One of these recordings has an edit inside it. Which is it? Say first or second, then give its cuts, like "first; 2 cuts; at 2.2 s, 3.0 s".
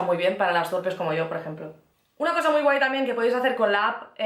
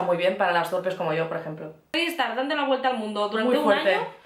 second; 1 cut; at 2.0 s